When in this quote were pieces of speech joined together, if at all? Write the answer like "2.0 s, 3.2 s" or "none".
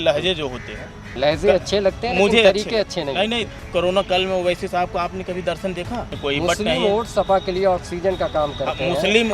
1.1 s, 3.4 s, 6.1 s